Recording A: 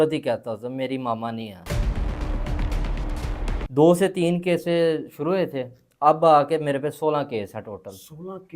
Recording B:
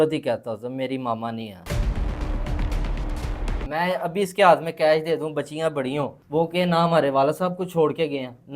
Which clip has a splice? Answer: B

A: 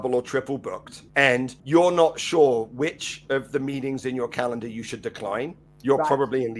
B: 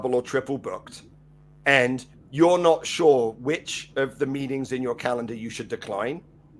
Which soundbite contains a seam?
A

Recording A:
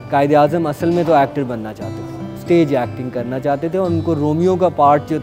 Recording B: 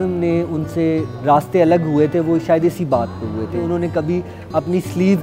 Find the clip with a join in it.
B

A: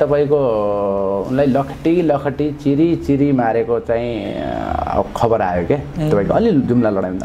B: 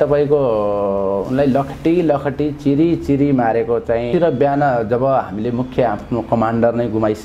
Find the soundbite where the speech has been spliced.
B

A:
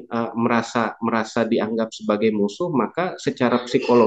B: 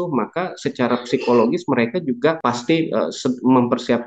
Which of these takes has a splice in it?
B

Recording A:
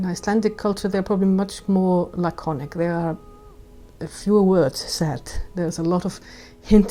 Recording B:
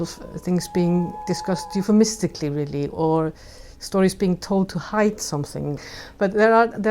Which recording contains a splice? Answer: B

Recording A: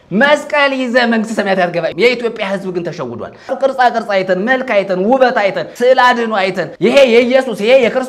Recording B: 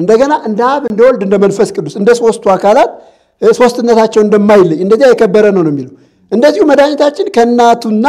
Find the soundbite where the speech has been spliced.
A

